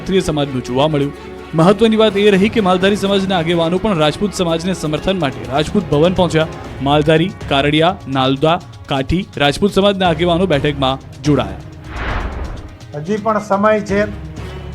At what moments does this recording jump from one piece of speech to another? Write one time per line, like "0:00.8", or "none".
0:08.8